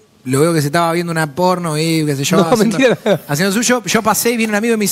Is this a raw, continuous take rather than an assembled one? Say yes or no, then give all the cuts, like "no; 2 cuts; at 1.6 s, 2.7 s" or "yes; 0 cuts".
yes; 0 cuts